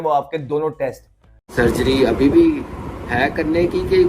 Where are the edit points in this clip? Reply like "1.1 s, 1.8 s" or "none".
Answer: 1.3 s